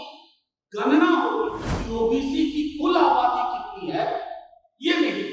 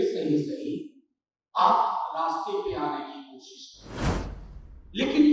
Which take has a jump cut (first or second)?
first